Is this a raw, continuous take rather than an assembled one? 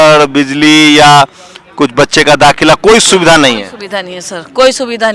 yes; 0 cuts

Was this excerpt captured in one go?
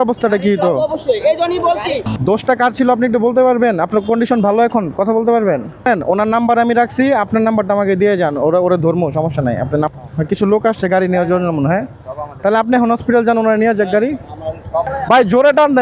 no; 4 cuts; at 2.0 s, 5.9 s, 9.9 s, 14.9 s

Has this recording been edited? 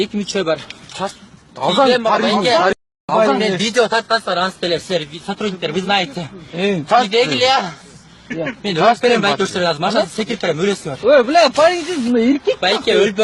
no; 0 cuts

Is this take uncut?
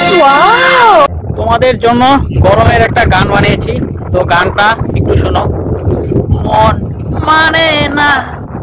no; 1 cut; at 1.1 s

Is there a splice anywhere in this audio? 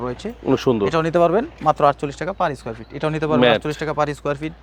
no; 0 cuts

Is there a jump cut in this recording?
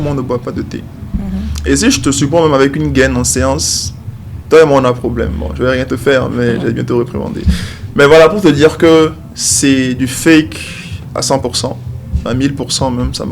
no; 0 cuts

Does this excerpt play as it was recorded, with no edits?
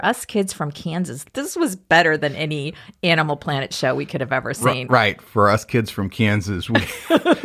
no; 1 cut; at 1.2 s

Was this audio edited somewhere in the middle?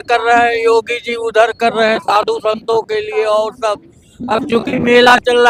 no; 0 cuts

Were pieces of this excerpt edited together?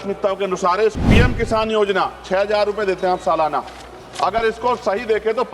yes; 1 cut; at 1.0 s

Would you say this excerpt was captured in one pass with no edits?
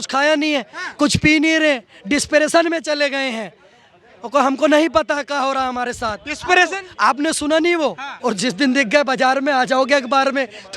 no; 1 cut; at 8.1 s

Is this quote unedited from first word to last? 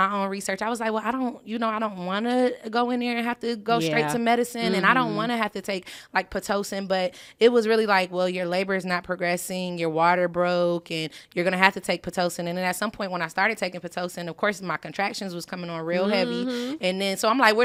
yes; 0 cuts

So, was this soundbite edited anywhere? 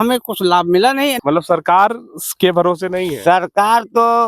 yes; 1 cut; at 1.2 s

